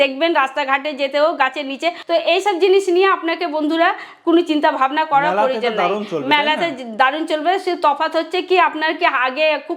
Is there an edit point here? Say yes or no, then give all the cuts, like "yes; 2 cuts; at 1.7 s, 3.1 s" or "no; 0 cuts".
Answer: yes; 1 cut; at 2.0 s